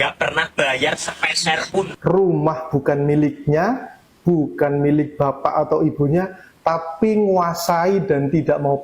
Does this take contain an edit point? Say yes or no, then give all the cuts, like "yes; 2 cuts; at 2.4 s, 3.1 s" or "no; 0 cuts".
yes; 1 cut; at 1.9 s